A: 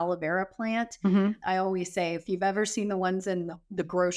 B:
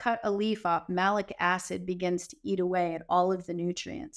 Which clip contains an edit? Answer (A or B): A